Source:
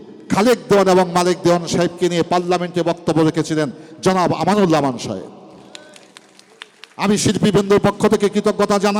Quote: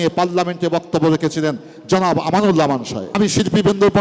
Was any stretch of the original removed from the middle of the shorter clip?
yes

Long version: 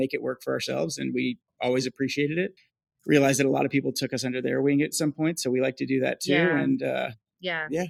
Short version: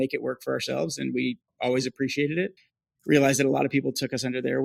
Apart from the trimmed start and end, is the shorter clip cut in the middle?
no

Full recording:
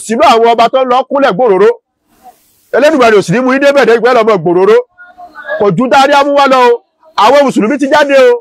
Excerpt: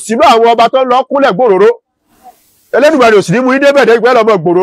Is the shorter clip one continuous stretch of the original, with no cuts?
yes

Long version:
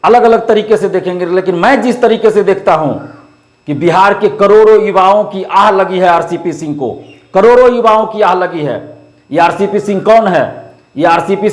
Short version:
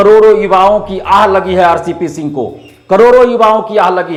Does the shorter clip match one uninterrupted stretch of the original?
yes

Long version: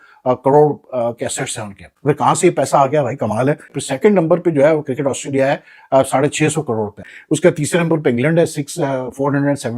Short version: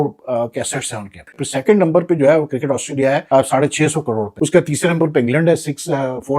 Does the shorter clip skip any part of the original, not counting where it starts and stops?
yes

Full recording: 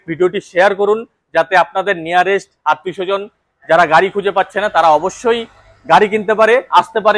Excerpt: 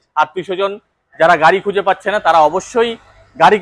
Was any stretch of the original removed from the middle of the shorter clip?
no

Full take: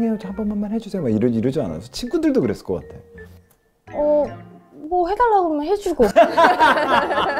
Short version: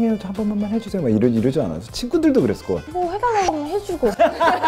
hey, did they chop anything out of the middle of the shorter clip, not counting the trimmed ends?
yes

